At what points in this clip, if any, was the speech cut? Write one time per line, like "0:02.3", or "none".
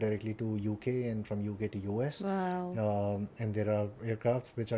none